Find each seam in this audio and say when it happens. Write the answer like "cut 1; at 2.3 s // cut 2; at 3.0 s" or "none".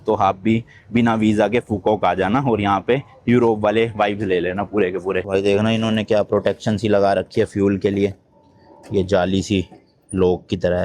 cut 1; at 5.2 s